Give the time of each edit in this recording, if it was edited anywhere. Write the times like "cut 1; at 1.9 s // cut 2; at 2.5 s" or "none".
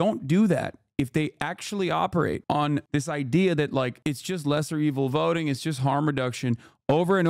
cut 1; at 2.8 s